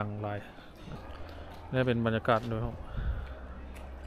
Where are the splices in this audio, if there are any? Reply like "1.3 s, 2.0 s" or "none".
1.0 s